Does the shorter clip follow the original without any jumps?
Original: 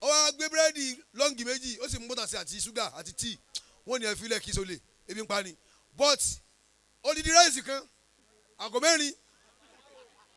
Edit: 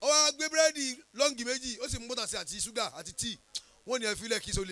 yes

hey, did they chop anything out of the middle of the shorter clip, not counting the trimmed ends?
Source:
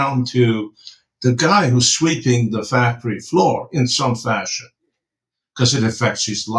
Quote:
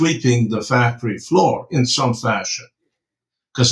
no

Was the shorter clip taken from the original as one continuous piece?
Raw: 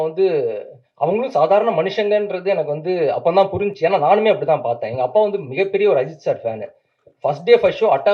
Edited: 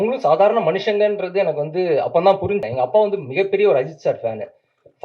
no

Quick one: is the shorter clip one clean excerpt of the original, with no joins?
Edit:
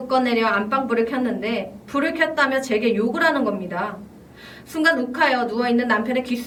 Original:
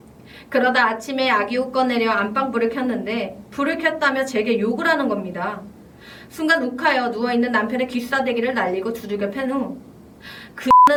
yes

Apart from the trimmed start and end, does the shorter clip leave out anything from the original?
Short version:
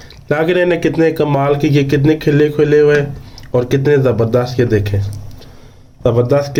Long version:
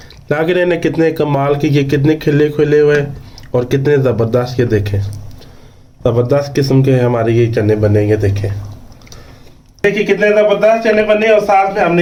no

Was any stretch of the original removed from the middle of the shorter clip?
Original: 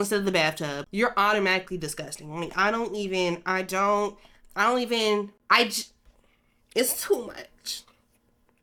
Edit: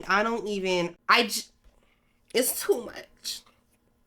yes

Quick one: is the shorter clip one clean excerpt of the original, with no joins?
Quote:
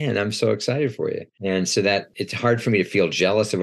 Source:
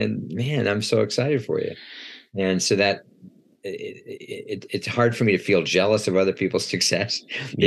no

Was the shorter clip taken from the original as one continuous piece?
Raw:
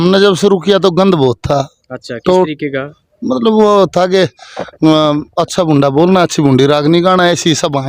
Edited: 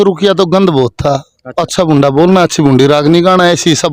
no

